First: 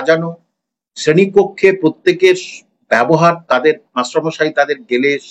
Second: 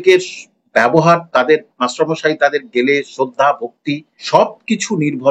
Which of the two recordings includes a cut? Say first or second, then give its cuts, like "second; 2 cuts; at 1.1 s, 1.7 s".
second; 1 cut; at 4.1 s